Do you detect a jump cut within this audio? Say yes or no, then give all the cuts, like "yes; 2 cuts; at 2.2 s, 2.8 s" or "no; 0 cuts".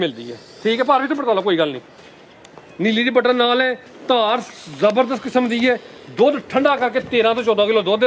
no; 0 cuts